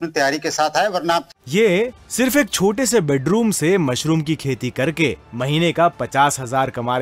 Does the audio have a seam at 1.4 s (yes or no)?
yes